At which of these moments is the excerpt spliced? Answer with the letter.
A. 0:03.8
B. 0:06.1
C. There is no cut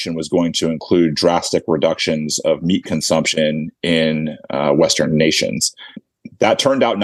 B